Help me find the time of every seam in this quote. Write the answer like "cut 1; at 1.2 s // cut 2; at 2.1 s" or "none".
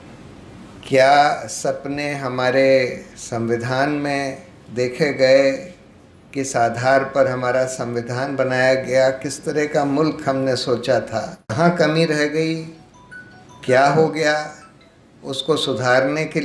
cut 1; at 11.5 s

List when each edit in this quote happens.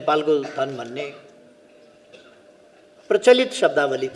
none

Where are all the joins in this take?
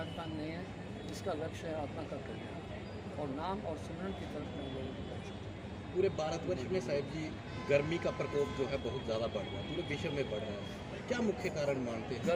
none

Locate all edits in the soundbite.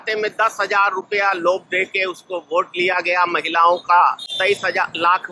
cut 1; at 4.3 s

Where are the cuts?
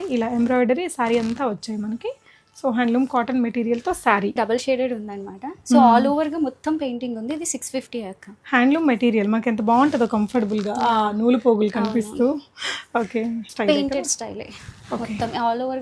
cut 1; at 4.4 s // cut 2; at 13.5 s

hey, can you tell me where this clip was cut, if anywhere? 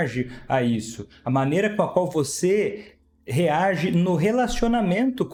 none

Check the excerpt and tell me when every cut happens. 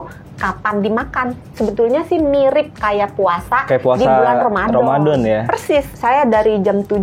cut 1; at 1.5 s // cut 2; at 5.9 s

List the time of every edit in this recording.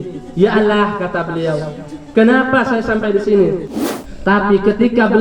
cut 1; at 3.6 s

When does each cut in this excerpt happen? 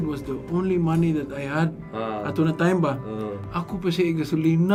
none

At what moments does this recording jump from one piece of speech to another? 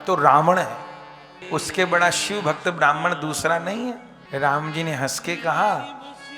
cut 1; at 1.3 s // cut 2; at 4.1 s

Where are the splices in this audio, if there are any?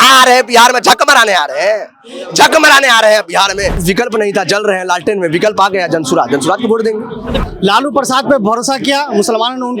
cut 1; at 3.8 s // cut 2; at 7.4 s

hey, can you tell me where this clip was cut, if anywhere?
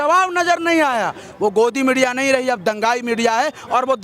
cut 1; at 1.3 s

